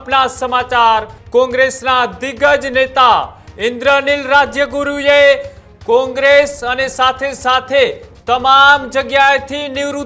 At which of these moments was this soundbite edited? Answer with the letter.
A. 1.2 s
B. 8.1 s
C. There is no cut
A